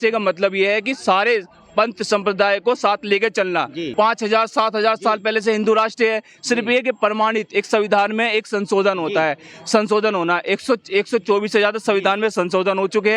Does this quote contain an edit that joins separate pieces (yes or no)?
yes